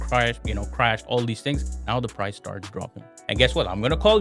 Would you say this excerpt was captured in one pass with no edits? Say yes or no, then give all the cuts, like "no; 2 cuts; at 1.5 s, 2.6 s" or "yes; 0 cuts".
no; 1 cut; at 3.1 s